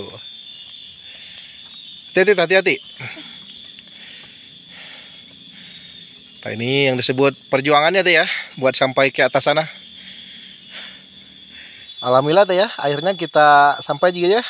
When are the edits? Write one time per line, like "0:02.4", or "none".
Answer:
0:11.9